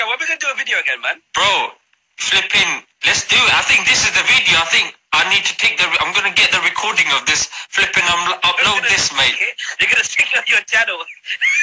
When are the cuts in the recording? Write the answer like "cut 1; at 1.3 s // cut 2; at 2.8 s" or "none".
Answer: none